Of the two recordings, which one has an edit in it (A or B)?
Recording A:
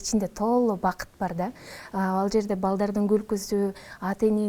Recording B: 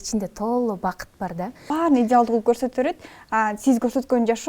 B